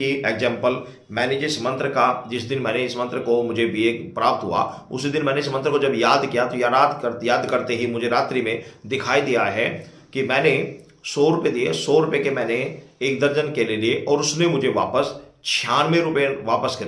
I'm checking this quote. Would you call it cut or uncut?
uncut